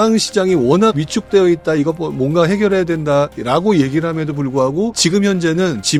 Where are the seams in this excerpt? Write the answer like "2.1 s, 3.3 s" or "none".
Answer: none